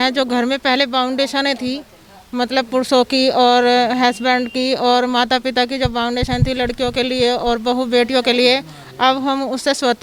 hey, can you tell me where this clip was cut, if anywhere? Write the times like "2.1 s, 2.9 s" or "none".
none